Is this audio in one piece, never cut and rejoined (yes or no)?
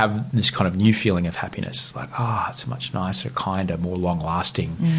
yes